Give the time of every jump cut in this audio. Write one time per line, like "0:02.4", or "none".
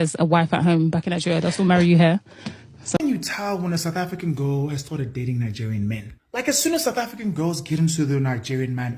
0:03.0